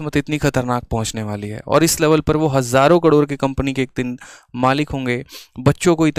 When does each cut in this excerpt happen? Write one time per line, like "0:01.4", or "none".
none